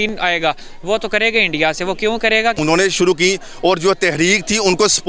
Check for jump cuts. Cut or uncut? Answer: cut